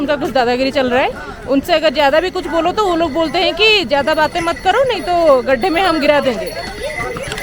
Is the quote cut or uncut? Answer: uncut